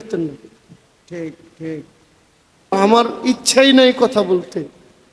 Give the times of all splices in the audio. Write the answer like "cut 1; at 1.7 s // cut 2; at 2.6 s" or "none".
cut 1; at 2.7 s